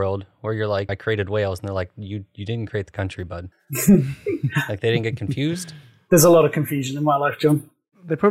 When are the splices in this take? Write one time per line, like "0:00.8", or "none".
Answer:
0:00.9
0:03.6